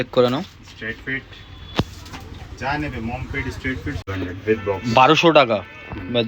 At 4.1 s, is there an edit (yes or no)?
yes